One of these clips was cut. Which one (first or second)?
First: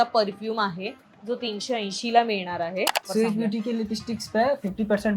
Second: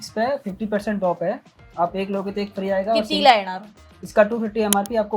first